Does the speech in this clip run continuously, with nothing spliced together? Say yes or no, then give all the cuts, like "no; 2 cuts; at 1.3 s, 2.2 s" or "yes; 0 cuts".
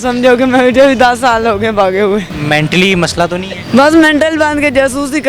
no; 2 cuts; at 2.3 s, 3.6 s